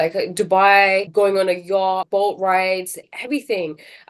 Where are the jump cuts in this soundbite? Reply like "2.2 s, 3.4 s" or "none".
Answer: 1.1 s, 2.0 s, 3.1 s

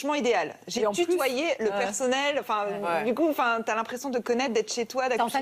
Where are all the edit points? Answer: 2.2 s

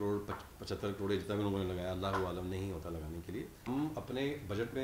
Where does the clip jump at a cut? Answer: 3.6 s

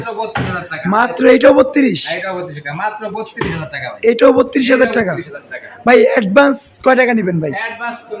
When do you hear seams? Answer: none

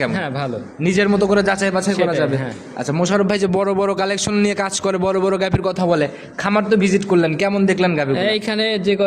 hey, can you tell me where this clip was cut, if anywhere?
none

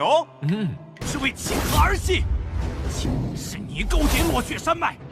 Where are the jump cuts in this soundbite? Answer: 1.0 s

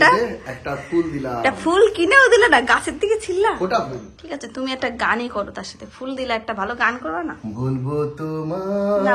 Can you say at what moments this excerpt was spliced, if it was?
4.2 s

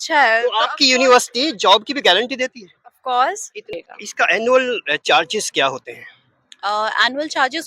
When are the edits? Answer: 3.7 s

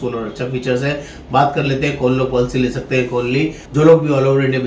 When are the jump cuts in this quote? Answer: 3.6 s

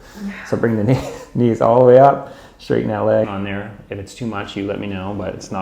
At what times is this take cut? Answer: 3.2 s

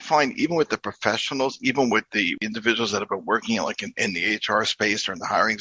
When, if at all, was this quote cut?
2.4 s

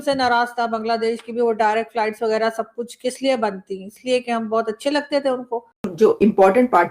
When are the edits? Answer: 5.8 s

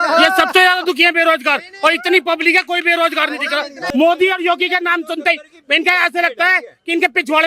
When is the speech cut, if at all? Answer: 3.8 s

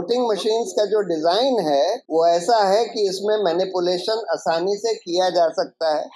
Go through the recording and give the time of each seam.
2.0 s

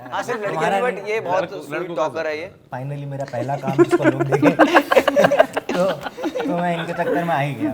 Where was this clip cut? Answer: 2.6 s

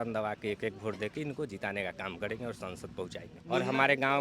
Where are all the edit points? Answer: 3.3 s

